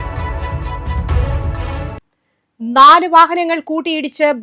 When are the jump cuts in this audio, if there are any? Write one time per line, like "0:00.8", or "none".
0:02.0